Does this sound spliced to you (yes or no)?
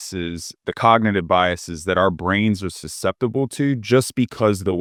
no